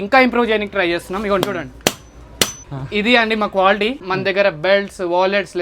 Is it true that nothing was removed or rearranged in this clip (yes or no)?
no